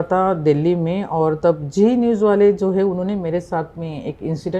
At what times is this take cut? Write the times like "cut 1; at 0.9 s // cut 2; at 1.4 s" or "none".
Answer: none